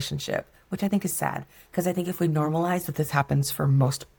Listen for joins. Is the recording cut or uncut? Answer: uncut